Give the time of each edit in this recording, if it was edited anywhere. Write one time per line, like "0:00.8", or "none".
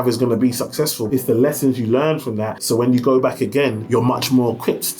0:01.0
0:02.5
0:03.8